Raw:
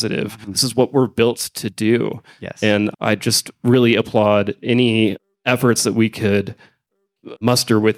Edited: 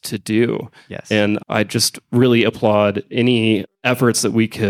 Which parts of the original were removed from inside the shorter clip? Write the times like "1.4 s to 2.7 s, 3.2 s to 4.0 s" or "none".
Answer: 5.2 s to 5.3 s